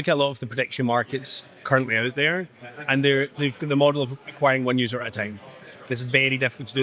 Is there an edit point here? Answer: no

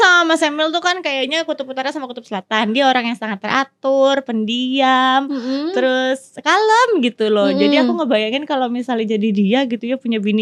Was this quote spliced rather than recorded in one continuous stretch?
no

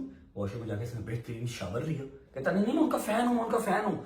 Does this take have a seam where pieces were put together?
yes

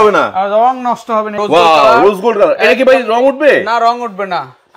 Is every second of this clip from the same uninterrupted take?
no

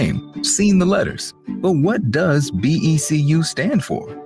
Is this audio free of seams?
no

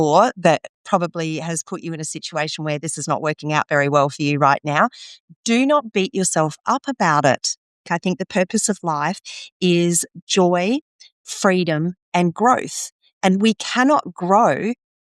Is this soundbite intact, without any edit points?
no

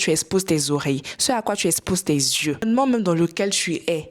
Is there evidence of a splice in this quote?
yes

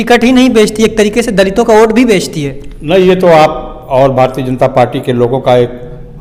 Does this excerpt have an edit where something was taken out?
no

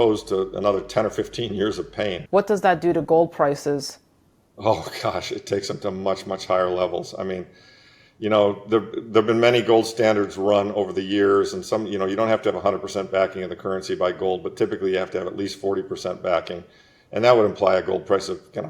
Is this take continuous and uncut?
no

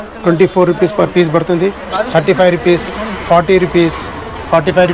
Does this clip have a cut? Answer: no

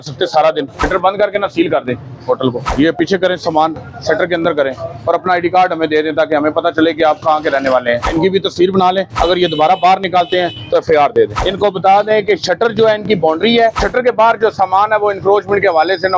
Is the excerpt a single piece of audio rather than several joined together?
no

